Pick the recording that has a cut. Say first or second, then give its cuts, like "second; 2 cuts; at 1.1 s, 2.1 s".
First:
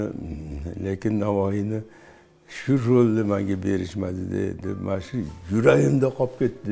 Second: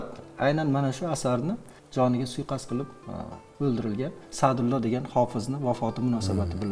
second; 1 cut; at 1.7 s